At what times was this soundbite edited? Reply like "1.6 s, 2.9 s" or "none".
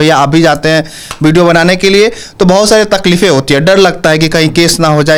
none